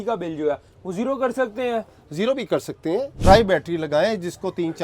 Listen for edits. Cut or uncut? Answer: cut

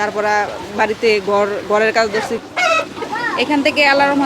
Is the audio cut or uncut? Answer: cut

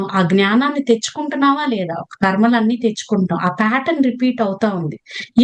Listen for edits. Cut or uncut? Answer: uncut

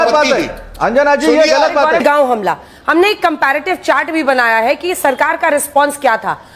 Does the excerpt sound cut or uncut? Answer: uncut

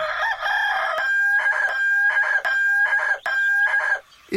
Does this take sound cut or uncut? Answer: cut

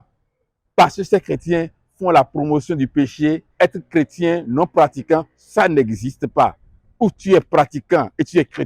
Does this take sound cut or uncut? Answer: cut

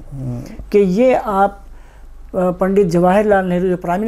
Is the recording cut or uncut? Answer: uncut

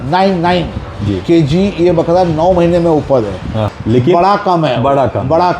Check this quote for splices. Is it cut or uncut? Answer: cut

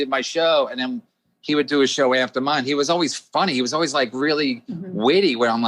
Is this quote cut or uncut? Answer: uncut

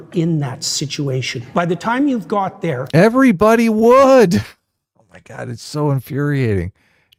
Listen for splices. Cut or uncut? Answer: uncut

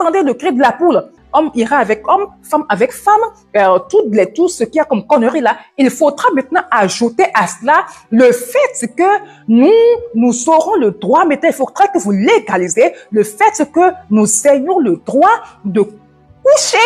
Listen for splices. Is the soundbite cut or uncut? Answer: cut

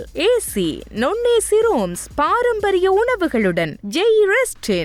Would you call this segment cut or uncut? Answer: uncut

